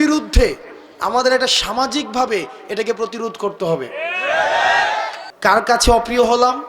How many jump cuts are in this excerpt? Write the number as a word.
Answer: one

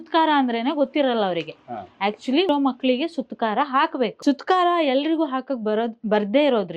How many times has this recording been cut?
one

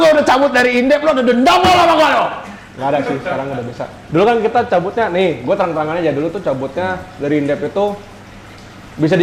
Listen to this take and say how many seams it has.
zero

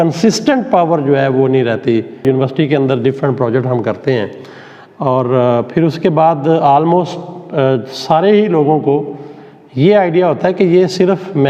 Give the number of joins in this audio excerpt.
one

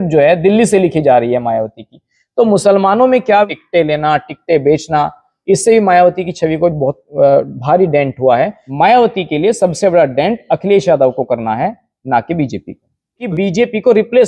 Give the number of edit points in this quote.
three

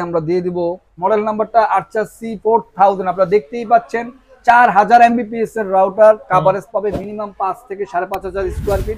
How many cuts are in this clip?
one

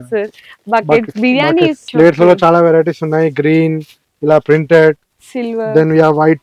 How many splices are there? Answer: one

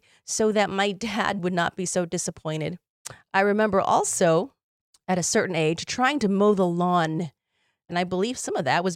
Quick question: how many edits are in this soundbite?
two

